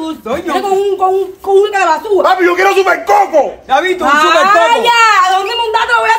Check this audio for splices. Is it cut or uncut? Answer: uncut